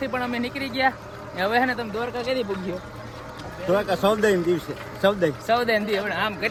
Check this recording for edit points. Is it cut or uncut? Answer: uncut